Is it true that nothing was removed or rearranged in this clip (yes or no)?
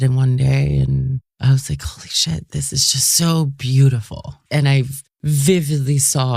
no